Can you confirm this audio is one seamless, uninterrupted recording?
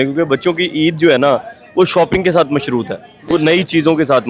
yes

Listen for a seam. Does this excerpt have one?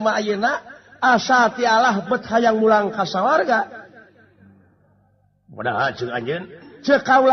no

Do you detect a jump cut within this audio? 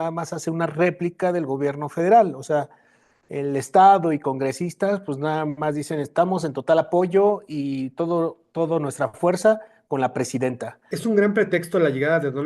yes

